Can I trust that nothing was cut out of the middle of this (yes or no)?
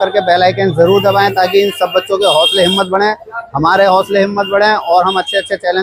yes